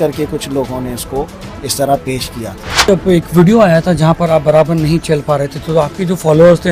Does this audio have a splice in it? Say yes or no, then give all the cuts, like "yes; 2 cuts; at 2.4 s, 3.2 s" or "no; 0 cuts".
yes; 1 cut; at 2.9 s